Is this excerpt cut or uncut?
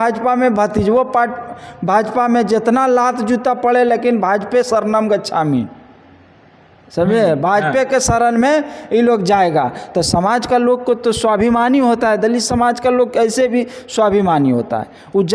uncut